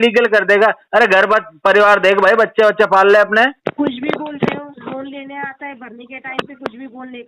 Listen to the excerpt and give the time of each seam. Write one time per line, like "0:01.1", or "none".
0:03.6